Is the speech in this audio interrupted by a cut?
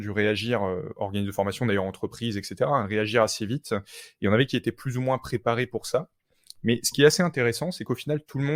no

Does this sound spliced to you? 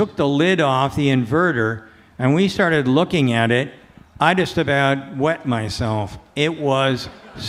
no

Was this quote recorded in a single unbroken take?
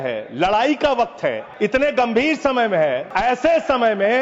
no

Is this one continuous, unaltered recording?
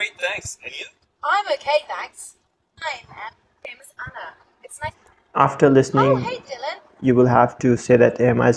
yes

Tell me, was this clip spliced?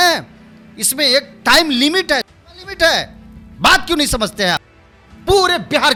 no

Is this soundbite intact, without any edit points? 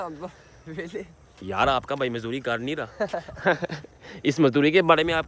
no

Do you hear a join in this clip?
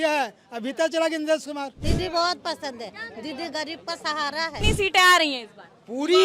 yes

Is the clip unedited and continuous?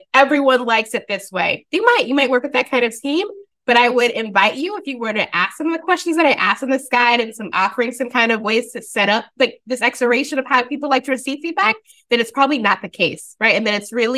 yes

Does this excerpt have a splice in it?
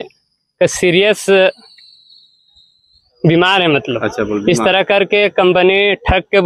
no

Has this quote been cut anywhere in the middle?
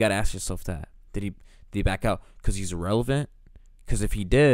no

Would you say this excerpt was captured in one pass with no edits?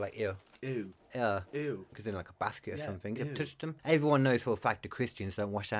no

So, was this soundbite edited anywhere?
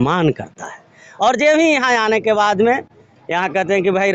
no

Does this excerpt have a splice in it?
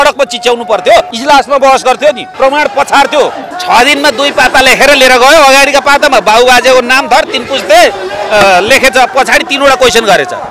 yes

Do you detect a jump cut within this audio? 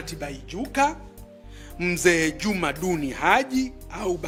no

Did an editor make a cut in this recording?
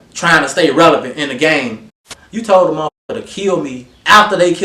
yes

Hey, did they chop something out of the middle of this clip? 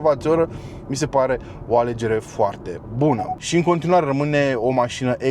yes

